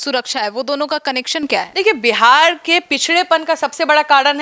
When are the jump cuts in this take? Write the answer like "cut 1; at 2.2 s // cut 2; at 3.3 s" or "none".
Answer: none